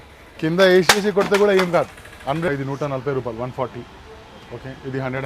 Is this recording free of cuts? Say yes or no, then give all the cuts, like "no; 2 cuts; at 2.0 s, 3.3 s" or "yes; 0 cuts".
no; 1 cut; at 2.6 s